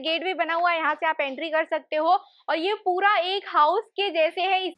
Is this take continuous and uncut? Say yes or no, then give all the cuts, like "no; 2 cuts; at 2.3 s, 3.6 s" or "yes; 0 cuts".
yes; 0 cuts